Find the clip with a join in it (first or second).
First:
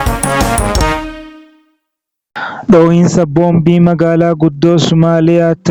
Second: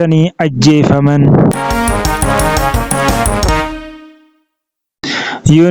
second